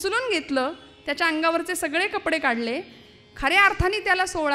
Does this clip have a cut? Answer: no; 0 cuts

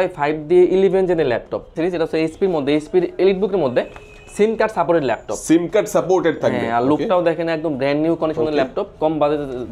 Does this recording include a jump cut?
yes; 2 cuts; at 1.8 s, 8.9 s

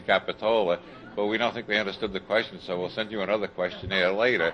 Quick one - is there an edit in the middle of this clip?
yes; 1 cut; at 1.4 s

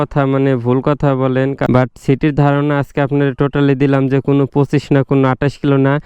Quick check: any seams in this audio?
yes; 1 cut; at 1.6 s

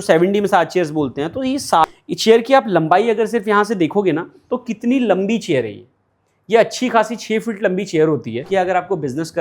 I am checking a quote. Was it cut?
yes; 2 cuts; at 1.8 s, 8.4 s

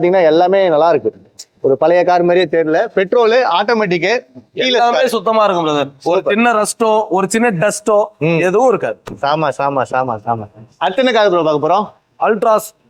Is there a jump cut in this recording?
no; 0 cuts

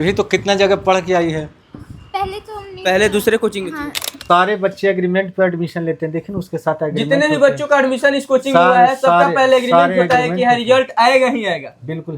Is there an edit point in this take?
yes; 1 cut; at 4.1 s

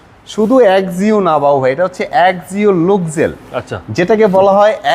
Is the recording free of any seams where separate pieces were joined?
yes; 0 cuts

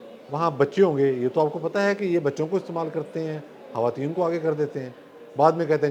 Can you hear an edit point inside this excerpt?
no; 0 cuts

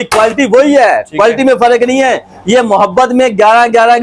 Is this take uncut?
yes; 0 cuts

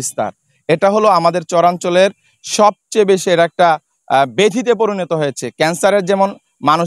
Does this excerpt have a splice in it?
no; 0 cuts

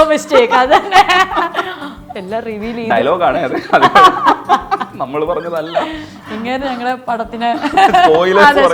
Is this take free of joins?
yes; 0 cuts

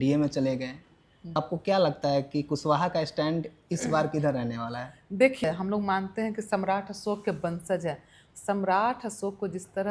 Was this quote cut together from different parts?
yes; 2 cuts; at 1.4 s, 5.4 s

